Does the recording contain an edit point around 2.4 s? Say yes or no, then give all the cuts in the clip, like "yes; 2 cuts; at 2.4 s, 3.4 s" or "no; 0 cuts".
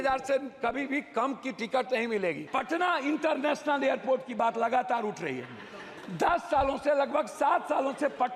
yes; 1 cut; at 2.4 s